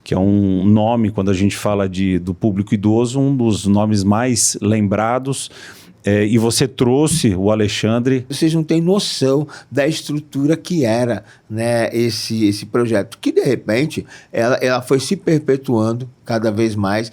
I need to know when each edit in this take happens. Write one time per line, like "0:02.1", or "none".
0:08.3